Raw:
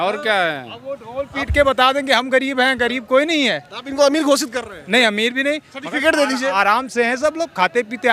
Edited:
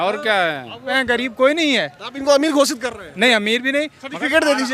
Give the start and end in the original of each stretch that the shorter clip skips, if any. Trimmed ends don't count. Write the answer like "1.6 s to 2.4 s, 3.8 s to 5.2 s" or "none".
1.0 s to 2.7 s